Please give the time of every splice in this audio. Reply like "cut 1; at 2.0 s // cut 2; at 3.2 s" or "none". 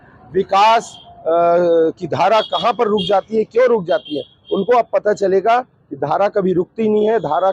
none